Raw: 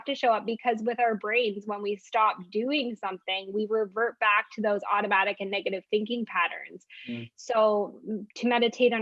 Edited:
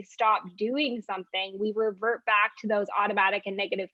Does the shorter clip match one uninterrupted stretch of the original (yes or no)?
yes